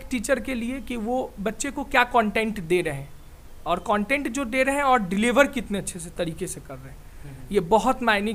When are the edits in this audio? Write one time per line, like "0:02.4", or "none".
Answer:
none